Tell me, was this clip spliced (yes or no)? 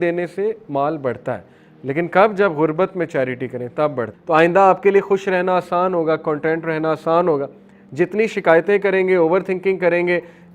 yes